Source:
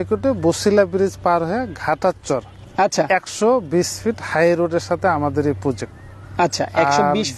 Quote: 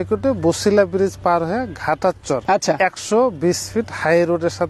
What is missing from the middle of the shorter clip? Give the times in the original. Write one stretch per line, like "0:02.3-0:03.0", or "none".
0:02.4-0:02.7